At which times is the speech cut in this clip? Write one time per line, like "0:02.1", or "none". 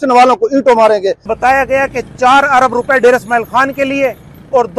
0:01.3